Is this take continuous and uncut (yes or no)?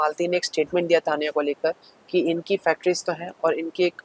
yes